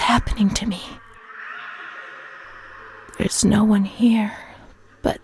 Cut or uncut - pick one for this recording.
cut